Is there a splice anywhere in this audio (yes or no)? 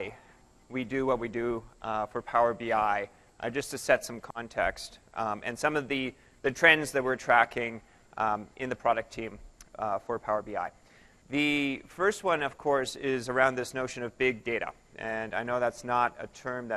yes